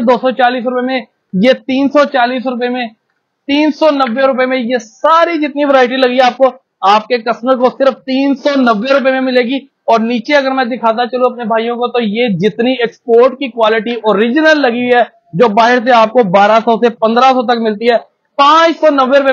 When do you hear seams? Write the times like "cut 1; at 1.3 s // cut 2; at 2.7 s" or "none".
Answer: none